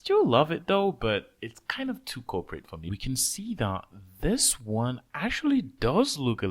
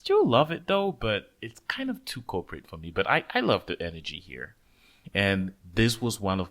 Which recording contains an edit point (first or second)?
first